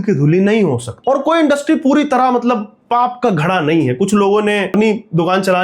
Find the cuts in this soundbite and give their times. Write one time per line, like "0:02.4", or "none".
0:00.9
0:04.7